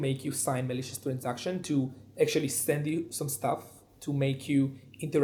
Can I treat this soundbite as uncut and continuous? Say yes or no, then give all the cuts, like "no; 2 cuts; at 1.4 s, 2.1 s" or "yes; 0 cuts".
yes; 0 cuts